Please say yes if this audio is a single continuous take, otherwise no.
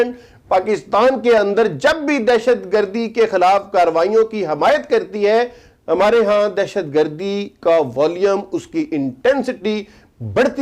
yes